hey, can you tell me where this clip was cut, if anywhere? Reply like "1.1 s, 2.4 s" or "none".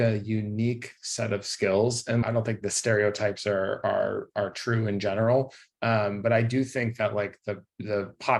2.4 s